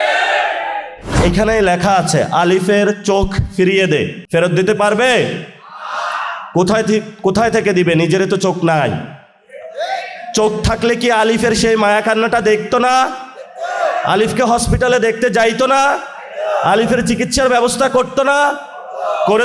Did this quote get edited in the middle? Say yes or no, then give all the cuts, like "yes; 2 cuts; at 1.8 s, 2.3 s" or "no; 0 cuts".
yes; 2 cuts; at 1.2 s, 4.2 s